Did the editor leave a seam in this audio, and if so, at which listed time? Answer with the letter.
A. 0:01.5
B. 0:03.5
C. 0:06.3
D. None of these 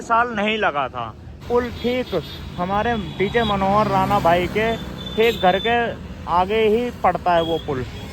A